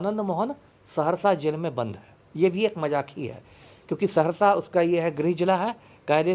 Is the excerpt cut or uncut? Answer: uncut